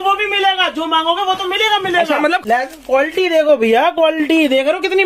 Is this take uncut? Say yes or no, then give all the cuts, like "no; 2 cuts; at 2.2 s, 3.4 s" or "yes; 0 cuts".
no; 1 cut; at 2.4 s